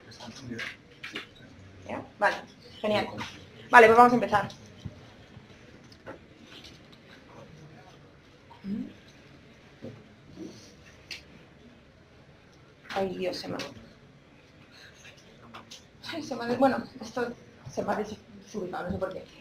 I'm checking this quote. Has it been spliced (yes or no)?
no